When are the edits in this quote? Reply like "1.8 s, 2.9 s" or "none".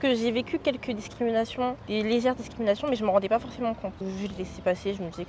1.8 s, 4.3 s